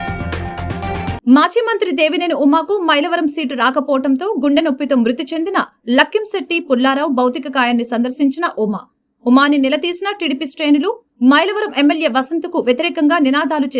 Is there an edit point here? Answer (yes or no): yes